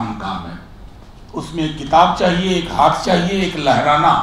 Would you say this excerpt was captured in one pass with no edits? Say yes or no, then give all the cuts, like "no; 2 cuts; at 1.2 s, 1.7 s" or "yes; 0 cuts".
yes; 0 cuts